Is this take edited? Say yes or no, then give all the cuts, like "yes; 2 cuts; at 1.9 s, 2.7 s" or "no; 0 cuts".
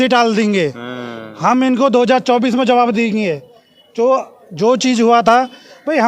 no; 0 cuts